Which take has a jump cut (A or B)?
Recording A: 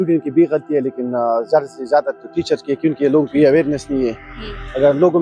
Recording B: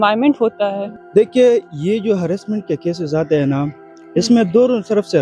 B